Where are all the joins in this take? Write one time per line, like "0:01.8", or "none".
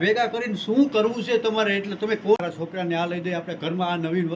0:02.4